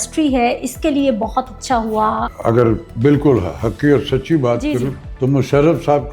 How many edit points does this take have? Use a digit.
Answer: 2